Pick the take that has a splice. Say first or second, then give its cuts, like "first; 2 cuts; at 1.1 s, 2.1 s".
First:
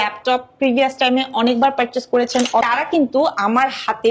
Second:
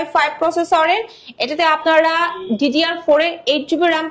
first; 1 cut; at 2.7 s